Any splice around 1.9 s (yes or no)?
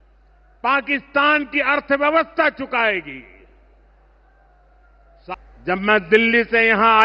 no